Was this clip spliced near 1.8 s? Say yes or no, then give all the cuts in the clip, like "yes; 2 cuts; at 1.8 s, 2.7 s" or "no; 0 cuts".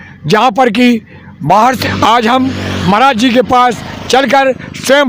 yes; 1 cut; at 1.8 s